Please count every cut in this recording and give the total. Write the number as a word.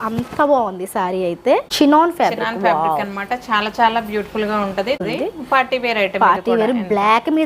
two